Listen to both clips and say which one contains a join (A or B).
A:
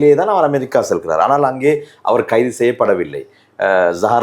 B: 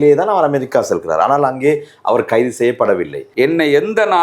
B